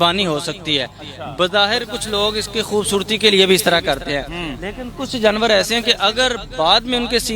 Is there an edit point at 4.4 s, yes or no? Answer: no